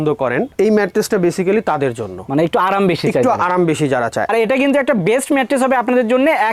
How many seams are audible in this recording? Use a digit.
1